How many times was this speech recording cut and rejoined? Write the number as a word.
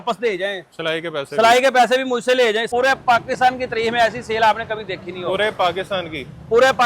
one